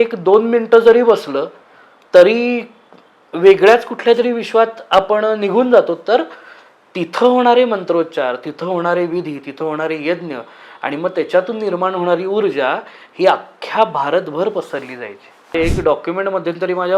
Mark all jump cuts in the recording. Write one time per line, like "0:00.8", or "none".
0:15.5